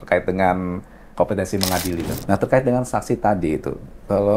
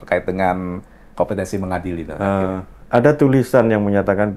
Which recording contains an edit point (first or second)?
first